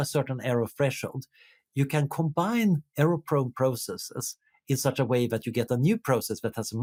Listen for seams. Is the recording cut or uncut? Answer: uncut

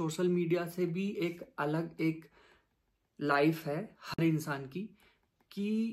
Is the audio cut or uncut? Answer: uncut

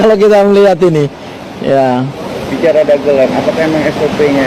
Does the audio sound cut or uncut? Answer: uncut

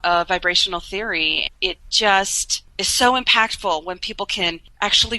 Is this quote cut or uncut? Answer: uncut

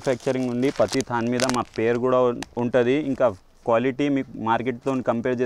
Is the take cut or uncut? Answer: uncut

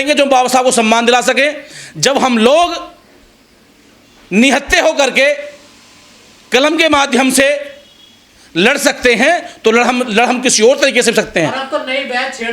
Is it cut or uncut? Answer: uncut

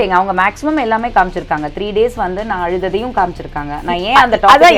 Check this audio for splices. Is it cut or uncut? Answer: uncut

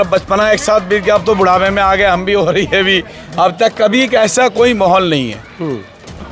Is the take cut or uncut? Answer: uncut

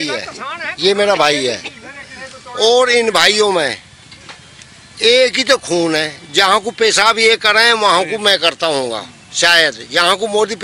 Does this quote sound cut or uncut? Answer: uncut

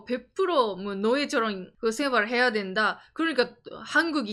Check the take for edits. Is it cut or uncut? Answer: cut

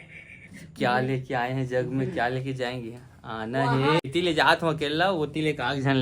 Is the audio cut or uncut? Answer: cut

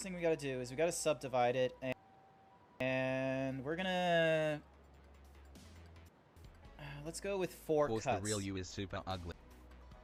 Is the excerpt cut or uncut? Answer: uncut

